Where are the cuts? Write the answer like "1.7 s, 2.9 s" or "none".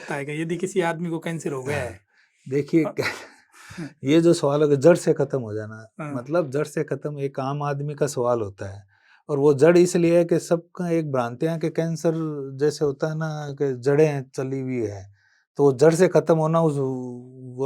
none